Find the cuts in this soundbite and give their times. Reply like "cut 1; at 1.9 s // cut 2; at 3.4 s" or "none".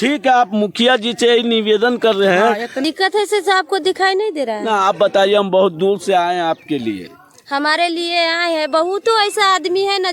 cut 1; at 2.7 s